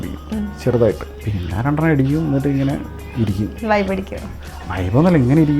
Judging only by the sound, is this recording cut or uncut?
cut